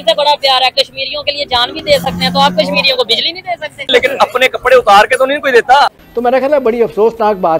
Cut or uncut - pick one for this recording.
cut